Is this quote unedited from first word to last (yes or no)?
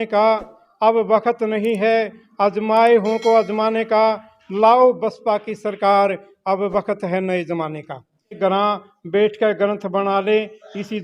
no